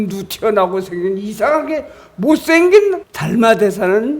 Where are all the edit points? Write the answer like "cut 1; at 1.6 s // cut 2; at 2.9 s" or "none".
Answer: cut 1; at 3.1 s